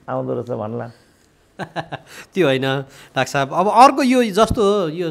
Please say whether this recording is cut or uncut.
uncut